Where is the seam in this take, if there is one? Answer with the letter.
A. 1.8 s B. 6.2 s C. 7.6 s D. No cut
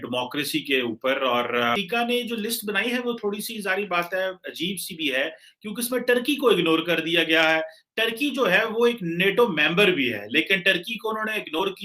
A